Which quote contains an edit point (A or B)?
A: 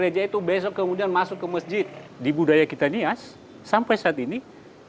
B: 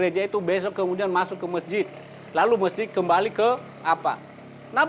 A